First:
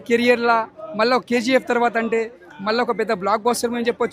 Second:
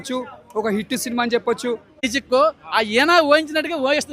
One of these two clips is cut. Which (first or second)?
second